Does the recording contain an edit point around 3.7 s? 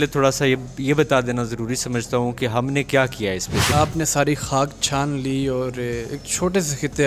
yes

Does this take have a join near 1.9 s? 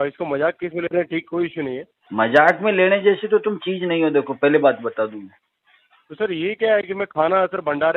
yes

